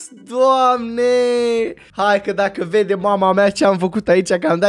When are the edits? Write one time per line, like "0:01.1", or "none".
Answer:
0:01.8

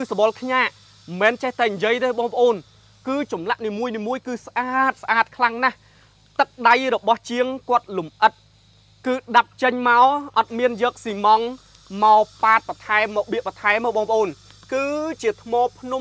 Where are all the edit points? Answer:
none

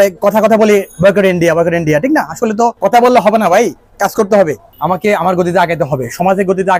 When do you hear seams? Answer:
0:02.8
0:04.7

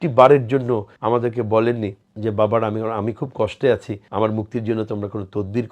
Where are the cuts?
0:00.9
0:02.0
0:04.0

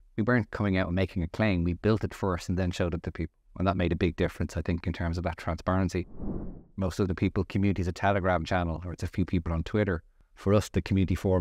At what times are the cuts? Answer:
0:06.4

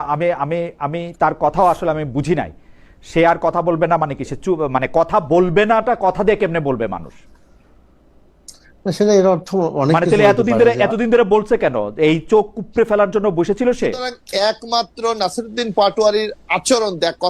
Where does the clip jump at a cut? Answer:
0:14.2

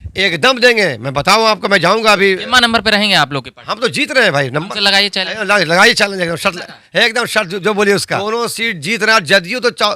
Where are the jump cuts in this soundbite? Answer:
0:08.2

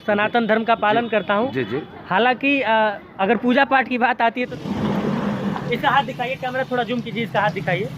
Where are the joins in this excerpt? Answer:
0:04.5

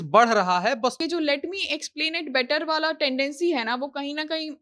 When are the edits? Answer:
0:01.0

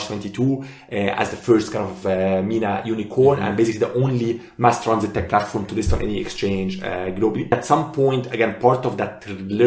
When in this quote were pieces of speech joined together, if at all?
0:07.5

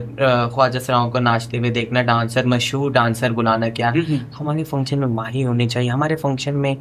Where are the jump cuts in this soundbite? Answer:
none

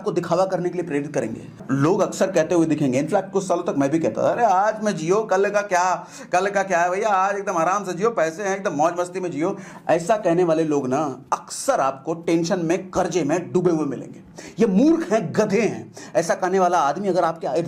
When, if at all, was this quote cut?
0:01.6

